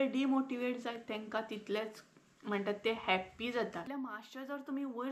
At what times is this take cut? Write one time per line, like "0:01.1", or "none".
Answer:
0:03.9